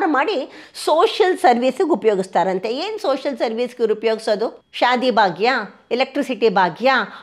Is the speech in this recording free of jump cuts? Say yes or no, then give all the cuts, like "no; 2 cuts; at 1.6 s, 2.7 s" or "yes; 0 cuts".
no; 1 cut; at 4.6 s